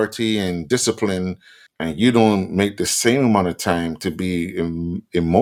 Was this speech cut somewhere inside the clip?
no; 0 cuts

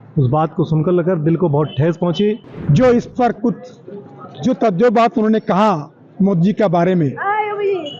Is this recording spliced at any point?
yes; 1 cut; at 2.5 s

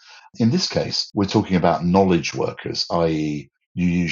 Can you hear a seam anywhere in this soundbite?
yes; 1 cut; at 1.0 s

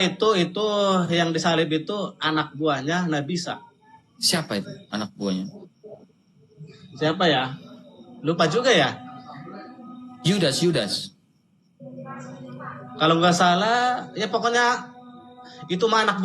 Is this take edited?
no; 0 cuts

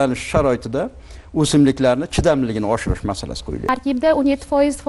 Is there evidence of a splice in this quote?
yes; 1 cut; at 3.6 s

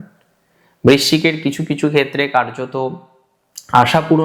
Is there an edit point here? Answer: no; 0 cuts

